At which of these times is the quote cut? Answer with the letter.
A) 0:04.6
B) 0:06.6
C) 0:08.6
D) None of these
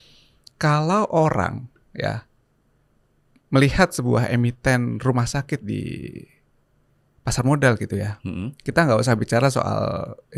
D